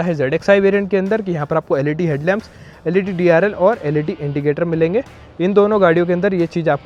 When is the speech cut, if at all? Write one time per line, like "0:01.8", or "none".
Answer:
none